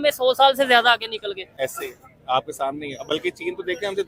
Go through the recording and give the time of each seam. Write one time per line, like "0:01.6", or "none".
none